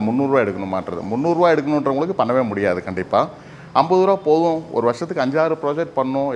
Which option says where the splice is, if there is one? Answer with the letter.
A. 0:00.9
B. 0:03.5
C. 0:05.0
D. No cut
D